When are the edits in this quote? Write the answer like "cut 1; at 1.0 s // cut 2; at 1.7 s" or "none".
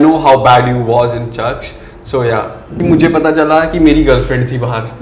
cut 1; at 2.7 s